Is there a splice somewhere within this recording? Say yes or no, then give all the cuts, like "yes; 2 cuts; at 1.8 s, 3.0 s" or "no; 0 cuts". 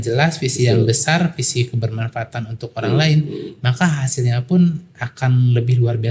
no; 0 cuts